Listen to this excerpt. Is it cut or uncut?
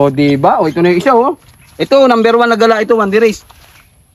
uncut